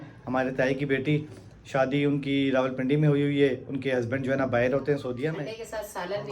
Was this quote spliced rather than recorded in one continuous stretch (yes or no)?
yes